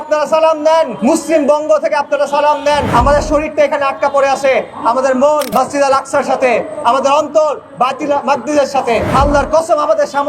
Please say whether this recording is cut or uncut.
cut